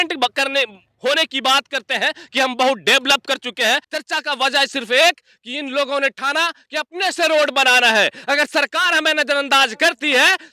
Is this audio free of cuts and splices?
no; 1 cut; at 3.9 s

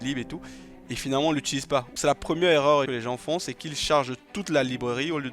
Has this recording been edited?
yes; 2 cuts; at 1.9 s, 2.9 s

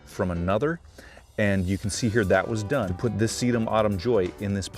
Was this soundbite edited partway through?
yes; 1 cut; at 2.9 s

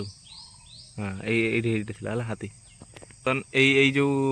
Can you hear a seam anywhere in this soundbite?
yes; 1 cut; at 3.2 s

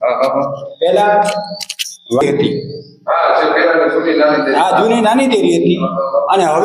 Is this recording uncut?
no; 1 cut; at 2.2 s

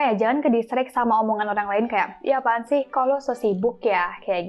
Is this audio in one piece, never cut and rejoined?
yes; 0 cuts

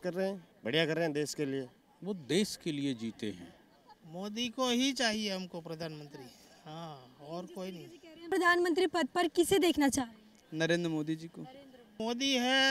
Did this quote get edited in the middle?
yes; 4 cuts; at 1.7 s, 4.0 s, 8.2 s, 12.0 s

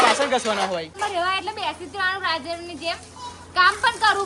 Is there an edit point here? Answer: yes; 1 cut; at 0.9 s

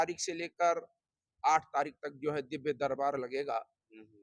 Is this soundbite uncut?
yes; 0 cuts

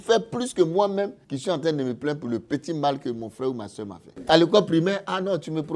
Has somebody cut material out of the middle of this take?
yes; 2 cuts; at 1.3 s, 4.2 s

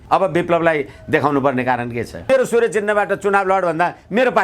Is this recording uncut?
no; 1 cut; at 2.3 s

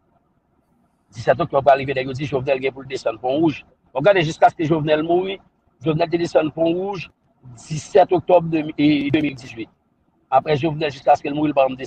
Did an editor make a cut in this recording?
no; 0 cuts

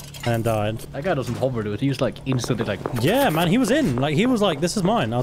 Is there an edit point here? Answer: yes; 1 cut; at 2.9 s

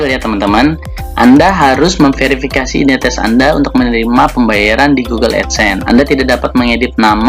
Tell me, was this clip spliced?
no; 0 cuts

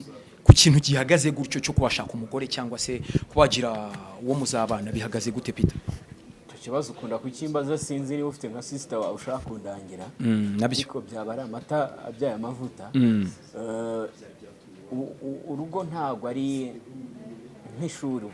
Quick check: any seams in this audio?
no; 0 cuts

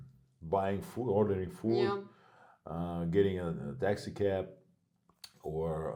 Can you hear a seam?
no; 0 cuts

